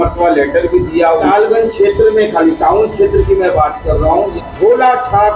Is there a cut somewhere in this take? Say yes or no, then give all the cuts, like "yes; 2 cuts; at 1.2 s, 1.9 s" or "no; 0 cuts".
yes; 2 cuts; at 1.2 s, 4.3 s